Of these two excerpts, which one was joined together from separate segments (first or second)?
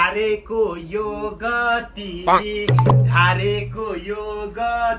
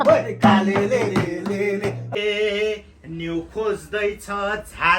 second